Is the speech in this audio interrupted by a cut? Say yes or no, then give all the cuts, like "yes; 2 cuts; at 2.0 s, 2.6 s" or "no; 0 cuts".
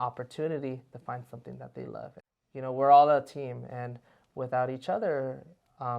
yes; 1 cut; at 2.2 s